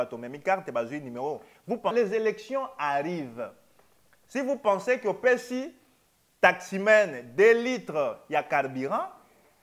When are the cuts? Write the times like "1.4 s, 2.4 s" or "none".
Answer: 1.9 s

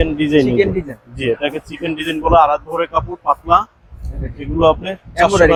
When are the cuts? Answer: none

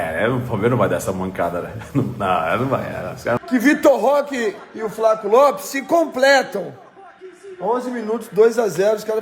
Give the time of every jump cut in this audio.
3.4 s

